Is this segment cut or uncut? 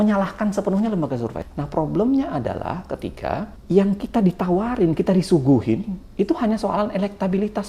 cut